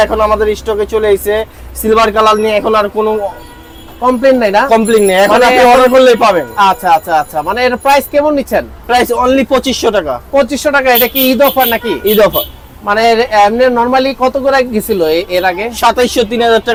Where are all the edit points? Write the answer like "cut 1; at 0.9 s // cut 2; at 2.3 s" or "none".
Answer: none